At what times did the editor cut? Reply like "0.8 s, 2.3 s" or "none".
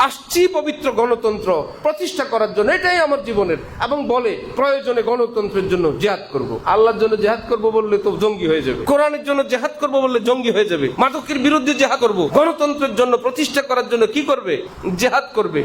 6.6 s, 8.8 s, 10.9 s, 12.1 s, 14.7 s